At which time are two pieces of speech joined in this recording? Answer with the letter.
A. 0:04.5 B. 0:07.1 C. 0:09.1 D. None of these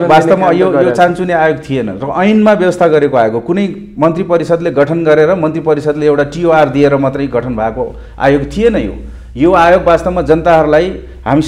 D